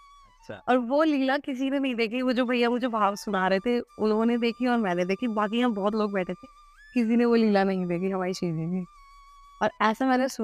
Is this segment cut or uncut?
uncut